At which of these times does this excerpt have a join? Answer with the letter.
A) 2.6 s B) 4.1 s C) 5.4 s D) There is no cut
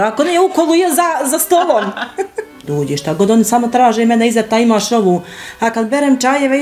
A